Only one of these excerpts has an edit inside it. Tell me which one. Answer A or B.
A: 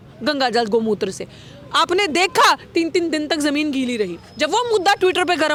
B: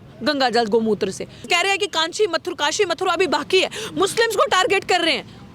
B